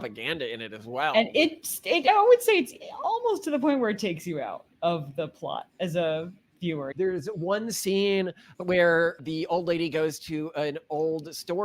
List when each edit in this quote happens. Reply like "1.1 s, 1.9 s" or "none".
6.9 s, 8.4 s